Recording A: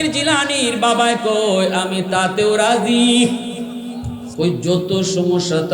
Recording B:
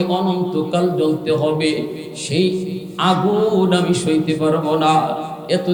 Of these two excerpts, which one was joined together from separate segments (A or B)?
A